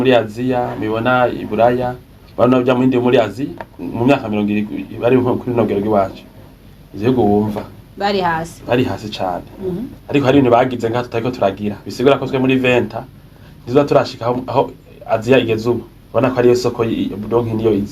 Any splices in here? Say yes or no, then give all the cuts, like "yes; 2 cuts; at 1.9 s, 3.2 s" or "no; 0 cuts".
yes; 3 cuts; at 3.8 s, 10.0 s, 15.9 s